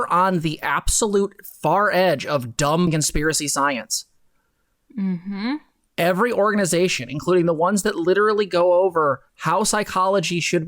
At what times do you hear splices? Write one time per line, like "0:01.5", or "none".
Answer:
0:02.9